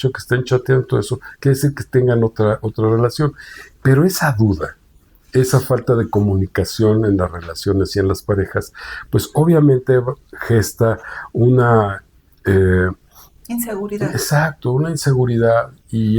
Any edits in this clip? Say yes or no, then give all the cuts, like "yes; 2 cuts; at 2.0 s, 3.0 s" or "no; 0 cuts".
no; 0 cuts